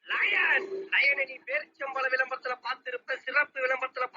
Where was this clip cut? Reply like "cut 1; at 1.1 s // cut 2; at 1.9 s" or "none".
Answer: cut 1; at 2.3 s